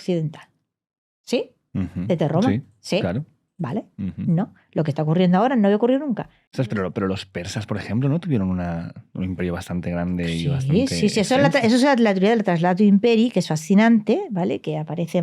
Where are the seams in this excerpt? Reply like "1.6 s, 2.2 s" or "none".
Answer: 6.7 s